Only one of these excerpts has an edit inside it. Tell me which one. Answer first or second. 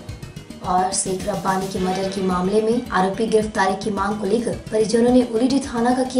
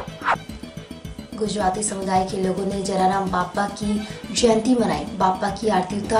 second